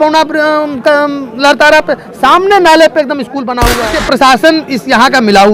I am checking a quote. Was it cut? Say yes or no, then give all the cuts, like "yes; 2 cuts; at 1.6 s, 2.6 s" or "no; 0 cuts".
yes; 1 cut; at 4.0 s